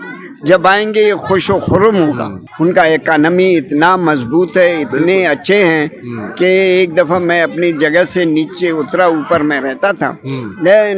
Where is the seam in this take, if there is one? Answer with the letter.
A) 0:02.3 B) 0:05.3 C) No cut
A